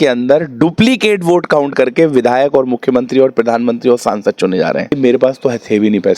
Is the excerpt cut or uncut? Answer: cut